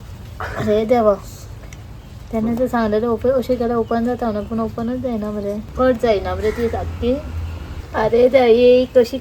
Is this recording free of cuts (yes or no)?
yes